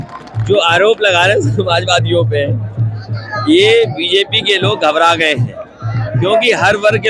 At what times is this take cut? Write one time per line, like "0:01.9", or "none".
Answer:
none